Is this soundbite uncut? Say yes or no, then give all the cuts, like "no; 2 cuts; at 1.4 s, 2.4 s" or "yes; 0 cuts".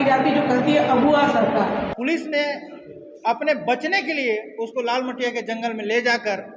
no; 1 cut; at 1.9 s